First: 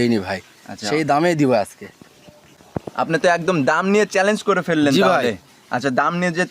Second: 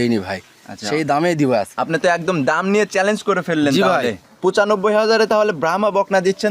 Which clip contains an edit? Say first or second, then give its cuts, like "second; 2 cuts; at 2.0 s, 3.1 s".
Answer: second; 2 cuts; at 1.7 s, 4.3 s